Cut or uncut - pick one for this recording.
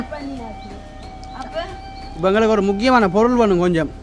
cut